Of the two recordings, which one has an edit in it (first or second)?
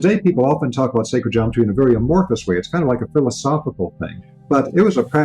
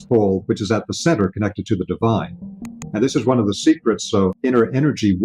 second